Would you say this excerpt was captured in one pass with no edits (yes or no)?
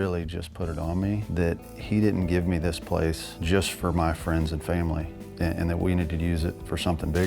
no